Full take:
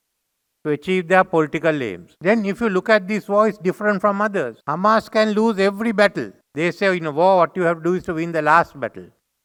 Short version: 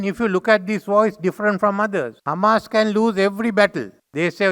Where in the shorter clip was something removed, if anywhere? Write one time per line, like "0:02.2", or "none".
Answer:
none